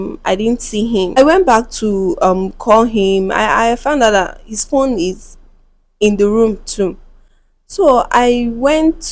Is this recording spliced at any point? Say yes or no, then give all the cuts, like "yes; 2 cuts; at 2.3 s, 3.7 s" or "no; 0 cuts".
yes; 1 cut; at 1.2 s